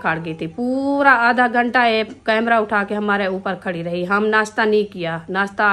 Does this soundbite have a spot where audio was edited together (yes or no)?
no